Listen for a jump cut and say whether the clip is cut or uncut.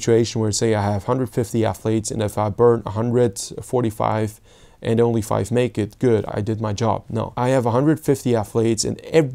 cut